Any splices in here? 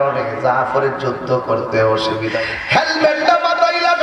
yes; 1 cut; at 2.4 s

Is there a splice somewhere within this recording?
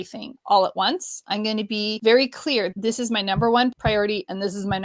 yes; 3 cuts; at 1.9 s, 2.7 s, 3.8 s

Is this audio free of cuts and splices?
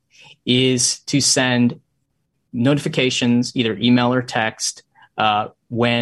yes; 0 cuts

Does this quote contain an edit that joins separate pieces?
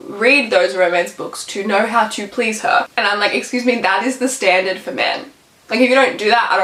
no; 0 cuts

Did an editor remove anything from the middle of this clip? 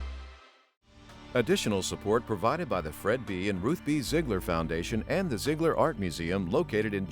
yes; 1 cut; at 1.2 s

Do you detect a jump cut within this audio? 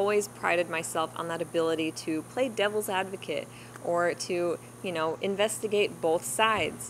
no; 0 cuts

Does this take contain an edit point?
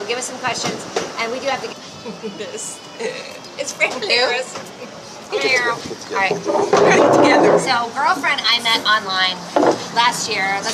no; 0 cuts

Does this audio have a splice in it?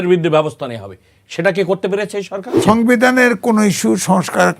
yes; 1 cut; at 2.4 s

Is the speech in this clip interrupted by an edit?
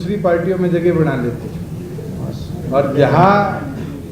no; 0 cuts

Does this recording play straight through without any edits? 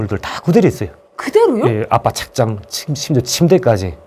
yes; 0 cuts

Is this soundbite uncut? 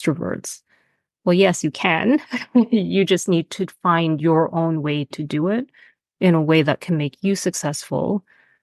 yes; 0 cuts

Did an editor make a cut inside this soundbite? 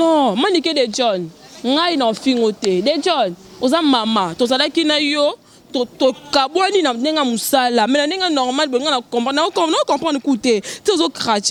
no; 0 cuts

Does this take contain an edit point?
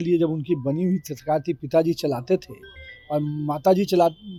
no; 0 cuts

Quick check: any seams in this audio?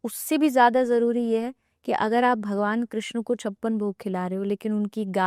no; 0 cuts

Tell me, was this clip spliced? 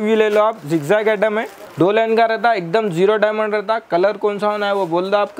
yes; 1 cut; at 1.6 s

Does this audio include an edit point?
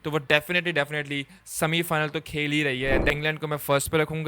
yes; 1 cut; at 3.1 s

